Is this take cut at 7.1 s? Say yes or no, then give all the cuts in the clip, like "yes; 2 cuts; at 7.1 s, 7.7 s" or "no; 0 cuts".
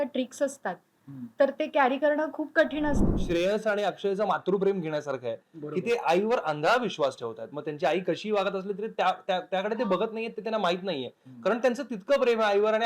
no; 1 cut; at 3.0 s